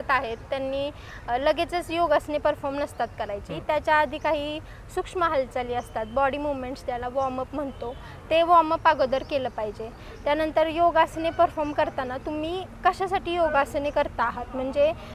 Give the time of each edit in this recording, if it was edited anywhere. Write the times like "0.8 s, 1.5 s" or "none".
none